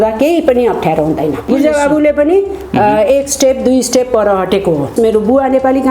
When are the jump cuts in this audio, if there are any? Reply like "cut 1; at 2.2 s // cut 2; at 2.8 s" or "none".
cut 1; at 1.5 s // cut 2; at 4.9 s